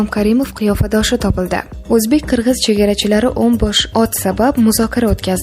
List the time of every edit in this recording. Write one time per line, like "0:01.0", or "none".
0:01.7